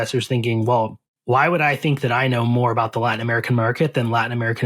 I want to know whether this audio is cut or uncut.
cut